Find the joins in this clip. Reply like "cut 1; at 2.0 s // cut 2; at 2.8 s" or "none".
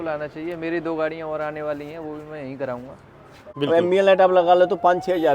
cut 1; at 3.5 s